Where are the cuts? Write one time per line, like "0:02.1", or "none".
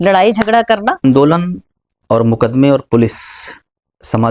0:01.0